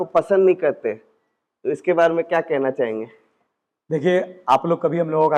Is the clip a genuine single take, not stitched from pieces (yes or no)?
yes